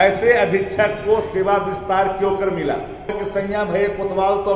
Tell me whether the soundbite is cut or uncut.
cut